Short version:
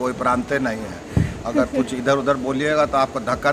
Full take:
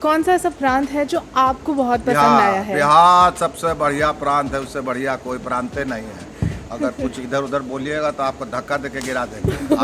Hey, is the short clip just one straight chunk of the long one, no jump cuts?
yes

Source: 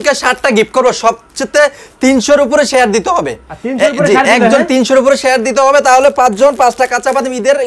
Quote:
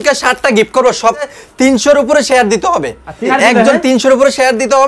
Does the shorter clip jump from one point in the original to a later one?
yes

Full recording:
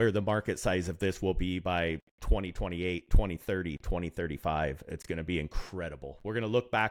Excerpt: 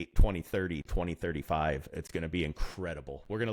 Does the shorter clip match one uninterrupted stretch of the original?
yes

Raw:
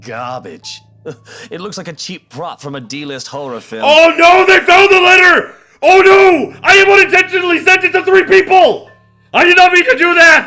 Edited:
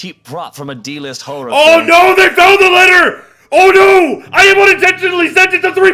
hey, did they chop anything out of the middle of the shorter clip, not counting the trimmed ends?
yes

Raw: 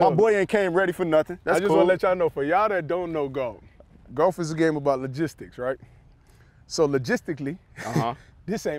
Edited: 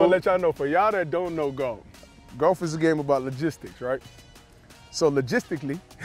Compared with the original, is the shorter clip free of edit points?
yes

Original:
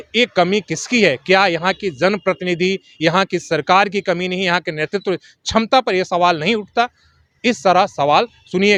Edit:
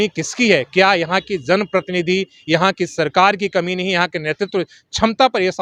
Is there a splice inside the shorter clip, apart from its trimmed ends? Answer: no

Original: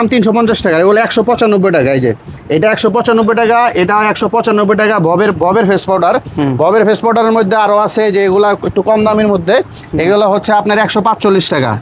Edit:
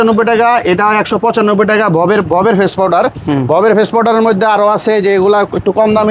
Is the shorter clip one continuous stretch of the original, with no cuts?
yes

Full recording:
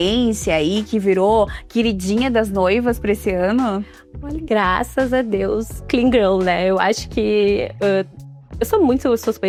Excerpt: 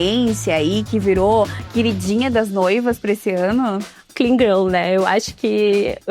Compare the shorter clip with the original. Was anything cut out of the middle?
yes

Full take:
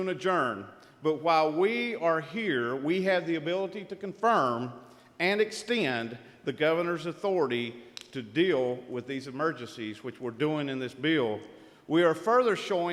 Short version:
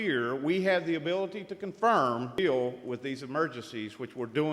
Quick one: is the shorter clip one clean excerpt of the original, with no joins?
no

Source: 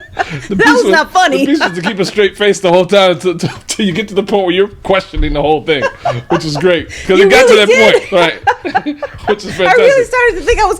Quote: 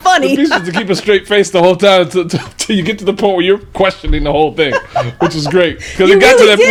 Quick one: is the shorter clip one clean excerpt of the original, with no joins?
yes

